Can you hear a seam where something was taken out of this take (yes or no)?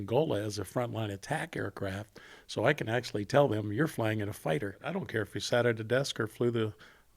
yes